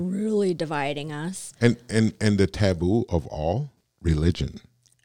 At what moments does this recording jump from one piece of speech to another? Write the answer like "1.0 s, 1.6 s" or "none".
3.8 s